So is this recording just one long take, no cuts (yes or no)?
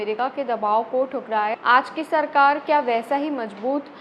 no